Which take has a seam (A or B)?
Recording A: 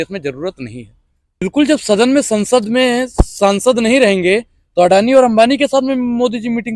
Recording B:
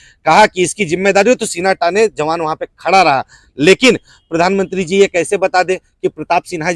A